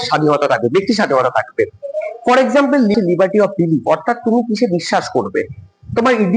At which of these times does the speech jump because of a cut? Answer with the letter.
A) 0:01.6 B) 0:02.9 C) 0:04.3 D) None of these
B